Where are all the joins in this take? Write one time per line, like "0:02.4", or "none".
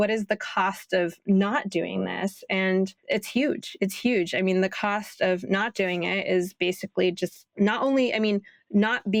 none